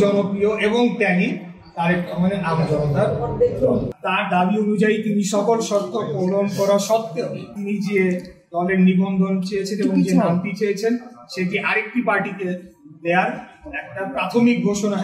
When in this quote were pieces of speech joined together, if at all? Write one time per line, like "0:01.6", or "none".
0:03.9
0:07.5